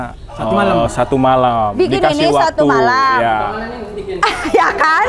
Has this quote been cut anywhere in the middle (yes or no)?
yes